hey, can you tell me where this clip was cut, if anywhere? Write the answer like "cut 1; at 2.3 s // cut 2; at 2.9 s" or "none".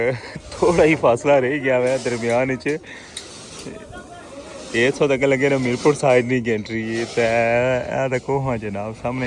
none

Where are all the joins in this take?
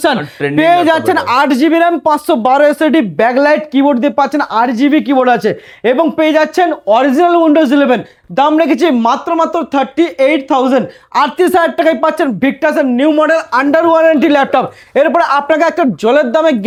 none

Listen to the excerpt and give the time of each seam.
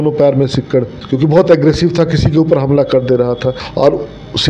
cut 1; at 1.0 s // cut 2; at 3.6 s

